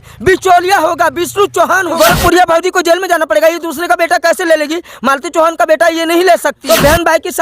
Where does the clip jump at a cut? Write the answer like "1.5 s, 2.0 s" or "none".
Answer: 2.0 s, 6.6 s